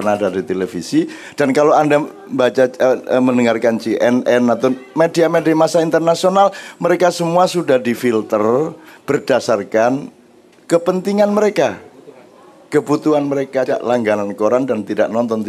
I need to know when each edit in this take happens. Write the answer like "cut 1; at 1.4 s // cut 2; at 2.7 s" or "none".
cut 1; at 13.7 s

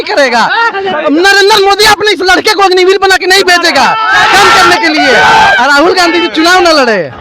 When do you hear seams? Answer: none

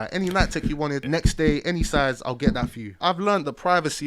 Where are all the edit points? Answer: cut 1; at 1.0 s // cut 2; at 3.0 s

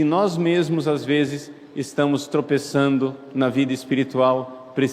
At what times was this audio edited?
cut 1; at 3.2 s

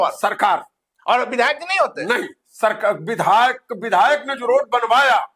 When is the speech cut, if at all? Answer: none

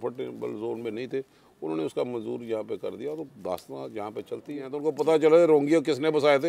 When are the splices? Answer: cut 1; at 4.7 s

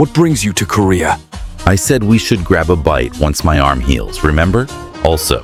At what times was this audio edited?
none

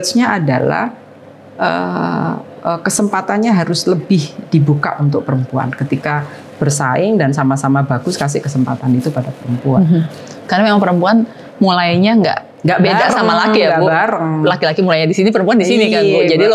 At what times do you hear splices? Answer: none

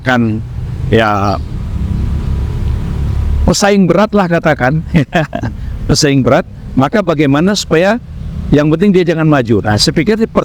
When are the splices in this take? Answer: none

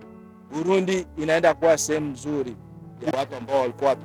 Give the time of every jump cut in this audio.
cut 1; at 3.1 s

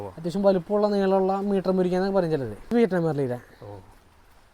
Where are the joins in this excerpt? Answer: cut 1; at 2.6 s

